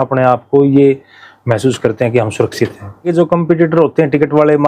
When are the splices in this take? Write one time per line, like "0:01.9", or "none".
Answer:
0:03.1